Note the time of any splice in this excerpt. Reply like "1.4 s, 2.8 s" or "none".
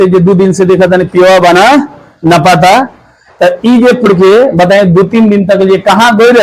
4.1 s